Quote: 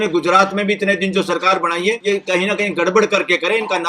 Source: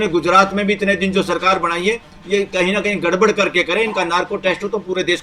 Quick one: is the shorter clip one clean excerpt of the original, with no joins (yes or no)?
no